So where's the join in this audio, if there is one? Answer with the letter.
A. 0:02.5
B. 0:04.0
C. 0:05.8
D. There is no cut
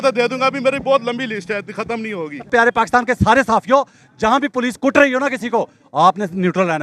A